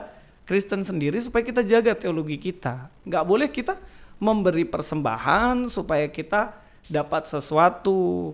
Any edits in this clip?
yes; 1 cut; at 3.0 s

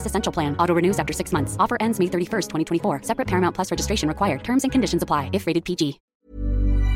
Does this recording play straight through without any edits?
no; 1 cut; at 6.0 s

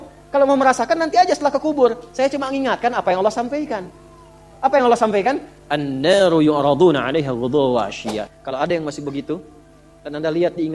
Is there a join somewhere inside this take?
yes; 1 cut; at 8.3 s

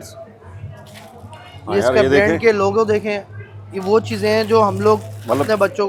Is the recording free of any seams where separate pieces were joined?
yes; 0 cuts

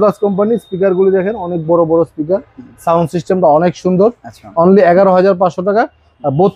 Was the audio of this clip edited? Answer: no; 0 cuts

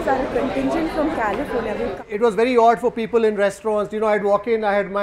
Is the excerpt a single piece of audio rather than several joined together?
no; 1 cut; at 2.0 s

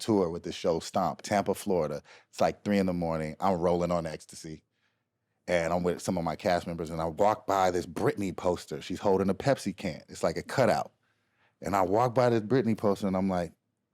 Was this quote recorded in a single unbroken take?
no; 1 cut; at 1.2 s

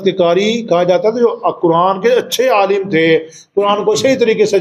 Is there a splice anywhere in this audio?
no; 0 cuts

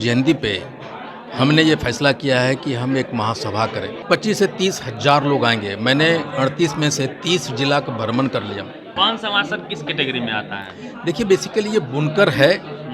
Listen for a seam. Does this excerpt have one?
yes; 2 cuts; at 4.0 s, 8.8 s

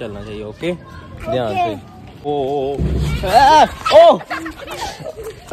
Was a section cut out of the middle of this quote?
yes; 1 cut; at 2.3 s

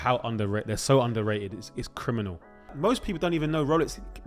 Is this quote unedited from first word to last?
no; 1 cut; at 2.7 s

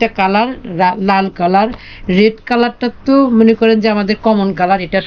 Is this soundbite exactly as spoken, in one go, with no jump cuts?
yes; 0 cuts

